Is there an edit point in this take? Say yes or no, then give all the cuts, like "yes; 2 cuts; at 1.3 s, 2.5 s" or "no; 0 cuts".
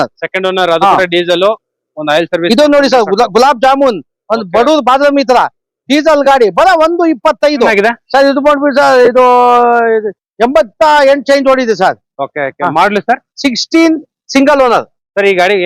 yes; 1 cut; at 7.7 s